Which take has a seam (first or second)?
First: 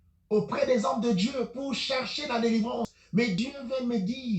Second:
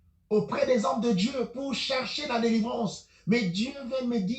first